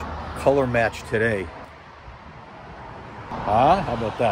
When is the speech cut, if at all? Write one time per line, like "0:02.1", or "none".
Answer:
0:01.6
0:03.3